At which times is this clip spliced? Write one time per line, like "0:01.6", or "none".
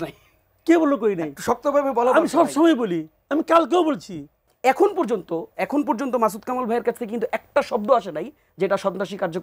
0:04.4